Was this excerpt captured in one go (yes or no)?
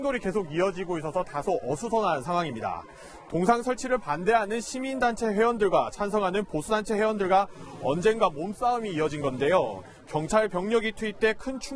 no